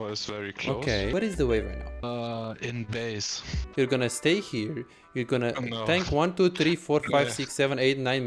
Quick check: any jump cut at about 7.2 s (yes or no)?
no